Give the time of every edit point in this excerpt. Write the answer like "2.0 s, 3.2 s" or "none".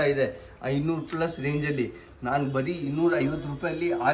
none